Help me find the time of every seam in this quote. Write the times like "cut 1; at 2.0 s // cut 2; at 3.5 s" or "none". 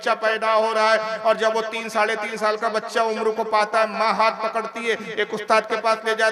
none